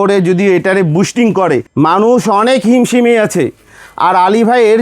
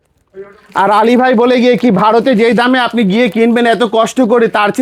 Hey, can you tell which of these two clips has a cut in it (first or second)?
first